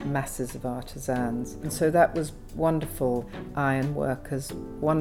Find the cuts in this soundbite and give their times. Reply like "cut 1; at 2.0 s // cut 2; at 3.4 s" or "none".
cut 1; at 1.7 s // cut 2; at 3.3 s